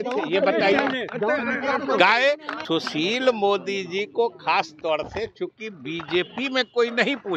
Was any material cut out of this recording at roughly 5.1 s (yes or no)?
no